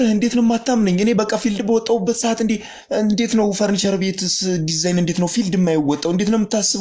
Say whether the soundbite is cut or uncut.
uncut